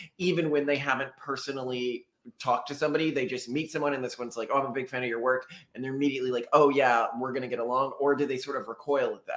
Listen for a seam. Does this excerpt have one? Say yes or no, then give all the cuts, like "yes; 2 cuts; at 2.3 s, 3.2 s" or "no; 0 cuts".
no; 0 cuts